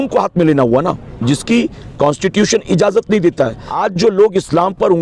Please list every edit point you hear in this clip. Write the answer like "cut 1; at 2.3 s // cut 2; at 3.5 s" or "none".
cut 1; at 3.6 s